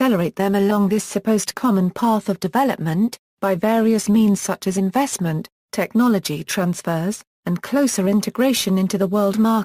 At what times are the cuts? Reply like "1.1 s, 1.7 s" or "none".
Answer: 4.7 s

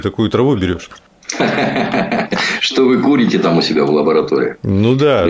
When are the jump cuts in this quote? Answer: none

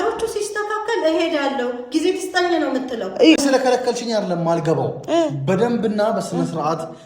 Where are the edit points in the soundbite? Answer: 3.4 s

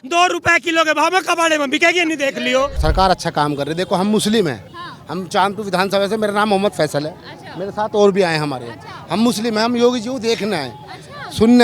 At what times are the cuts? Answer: 2.8 s

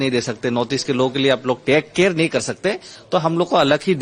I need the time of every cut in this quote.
none

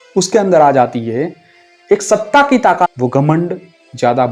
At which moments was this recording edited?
none

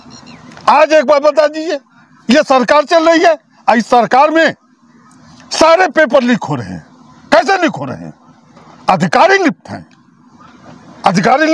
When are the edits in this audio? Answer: none

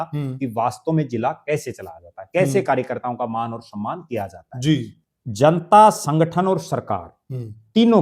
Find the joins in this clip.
4.9 s

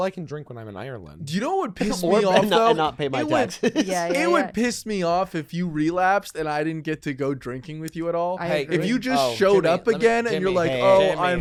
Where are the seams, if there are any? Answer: none

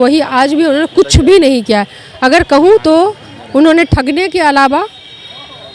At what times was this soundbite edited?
none

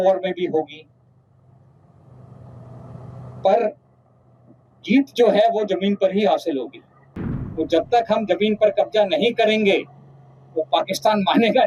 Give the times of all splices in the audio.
7.4 s

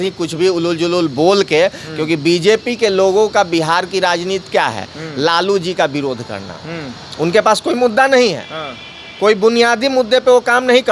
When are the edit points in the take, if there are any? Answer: none

